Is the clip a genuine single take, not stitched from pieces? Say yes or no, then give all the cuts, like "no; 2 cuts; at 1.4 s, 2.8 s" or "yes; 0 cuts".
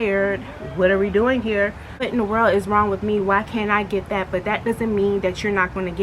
no; 1 cut; at 2.1 s